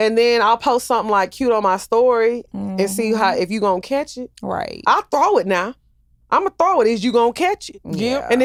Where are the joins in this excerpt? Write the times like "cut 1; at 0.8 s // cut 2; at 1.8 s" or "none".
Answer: none